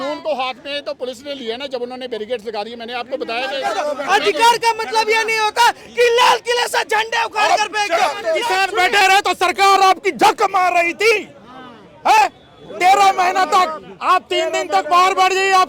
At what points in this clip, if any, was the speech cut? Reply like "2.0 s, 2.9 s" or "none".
3.6 s, 8.4 s